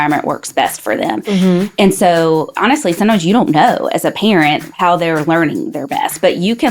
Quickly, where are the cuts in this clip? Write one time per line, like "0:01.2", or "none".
0:02.5
0:04.7